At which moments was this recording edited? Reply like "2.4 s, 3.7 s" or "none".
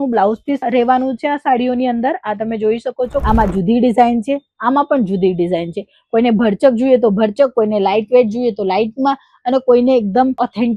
3.2 s